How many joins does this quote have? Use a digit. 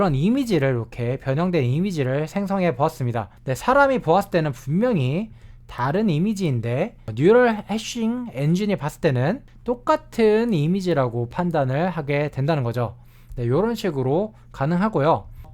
0